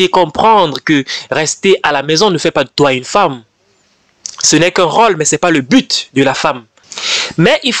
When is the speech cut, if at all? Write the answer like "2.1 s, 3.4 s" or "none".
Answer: 6.9 s